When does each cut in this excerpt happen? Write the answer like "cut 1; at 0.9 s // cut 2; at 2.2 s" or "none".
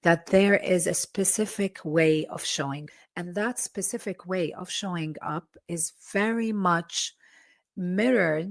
cut 1; at 3.0 s

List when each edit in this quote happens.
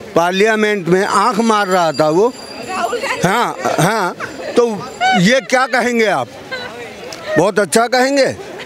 none

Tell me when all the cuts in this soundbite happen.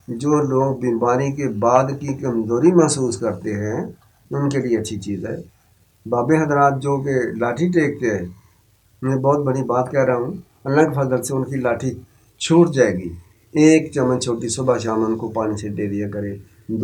none

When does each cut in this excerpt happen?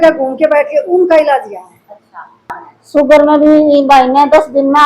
cut 1; at 2.5 s

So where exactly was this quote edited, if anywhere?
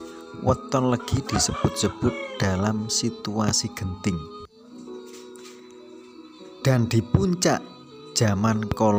none

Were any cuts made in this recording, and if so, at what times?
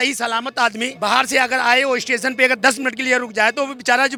none

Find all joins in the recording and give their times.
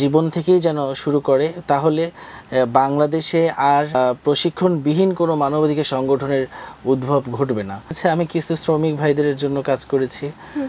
cut 1; at 4.0 s // cut 2; at 8.0 s

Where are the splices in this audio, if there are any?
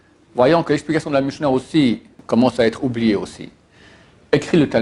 cut 1; at 2.1 s

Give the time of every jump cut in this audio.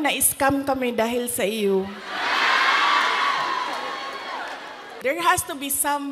cut 1; at 5.0 s

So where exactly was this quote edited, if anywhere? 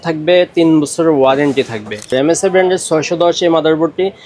cut 1; at 2.1 s

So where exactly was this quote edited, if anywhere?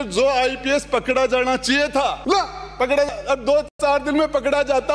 cut 1; at 2.2 s

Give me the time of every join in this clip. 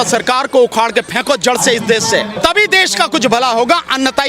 cut 1; at 2.3 s

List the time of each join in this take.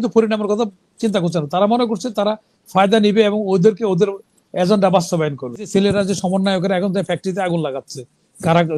cut 1; at 5.7 s

